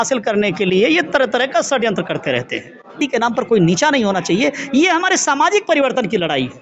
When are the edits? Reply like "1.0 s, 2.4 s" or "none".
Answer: 3.0 s